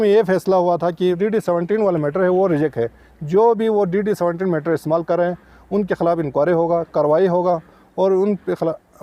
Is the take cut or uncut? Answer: cut